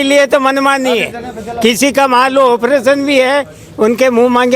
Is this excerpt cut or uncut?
uncut